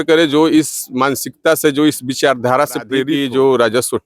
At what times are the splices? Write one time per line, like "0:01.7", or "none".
0:03.1